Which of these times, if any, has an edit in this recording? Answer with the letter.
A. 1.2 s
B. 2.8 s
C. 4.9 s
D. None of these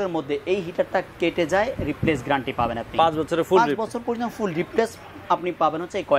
D